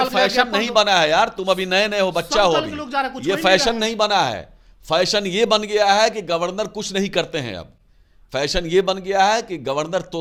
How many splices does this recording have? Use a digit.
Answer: 0